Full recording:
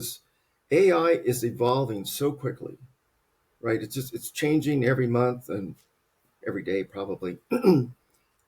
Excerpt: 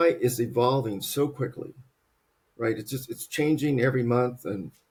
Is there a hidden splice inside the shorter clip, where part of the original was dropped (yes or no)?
no